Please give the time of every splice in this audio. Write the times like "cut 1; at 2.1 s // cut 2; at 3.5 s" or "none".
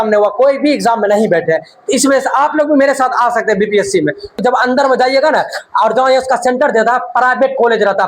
cut 1; at 4.4 s